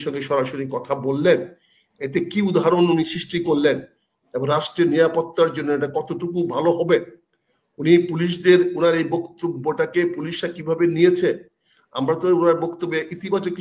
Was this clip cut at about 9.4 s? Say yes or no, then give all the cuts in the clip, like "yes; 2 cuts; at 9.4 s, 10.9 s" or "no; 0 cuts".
no; 0 cuts